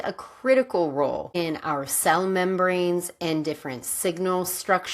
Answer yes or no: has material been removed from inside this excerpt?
yes